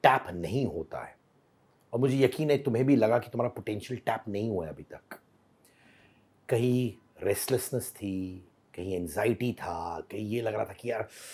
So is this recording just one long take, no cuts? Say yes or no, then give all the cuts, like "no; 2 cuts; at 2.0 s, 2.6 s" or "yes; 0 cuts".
yes; 0 cuts